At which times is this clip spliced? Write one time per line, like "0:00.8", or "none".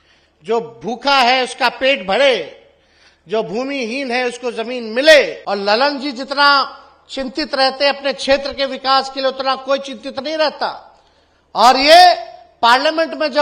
0:05.4